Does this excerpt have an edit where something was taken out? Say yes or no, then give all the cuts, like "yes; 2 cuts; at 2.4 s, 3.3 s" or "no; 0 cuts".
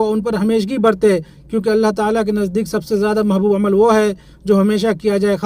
no; 0 cuts